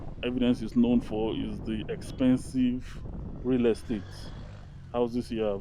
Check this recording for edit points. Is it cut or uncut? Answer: uncut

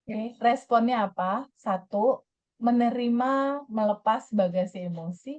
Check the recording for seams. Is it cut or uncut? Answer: uncut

